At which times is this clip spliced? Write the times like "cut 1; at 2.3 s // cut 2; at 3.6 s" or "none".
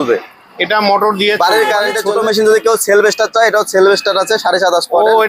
cut 1; at 2.0 s